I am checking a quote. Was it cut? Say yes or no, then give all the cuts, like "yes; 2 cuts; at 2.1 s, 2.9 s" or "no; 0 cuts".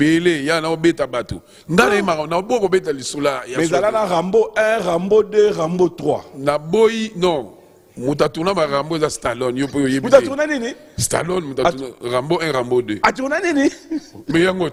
no; 0 cuts